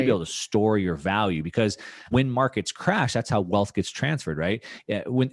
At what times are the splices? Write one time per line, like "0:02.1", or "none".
0:02.1